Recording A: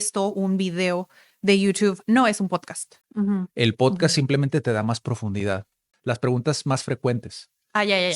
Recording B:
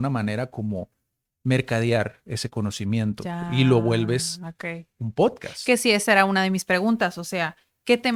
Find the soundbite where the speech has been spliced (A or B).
A